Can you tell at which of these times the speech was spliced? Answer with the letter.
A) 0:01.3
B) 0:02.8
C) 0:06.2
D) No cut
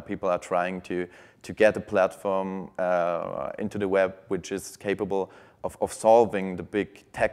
D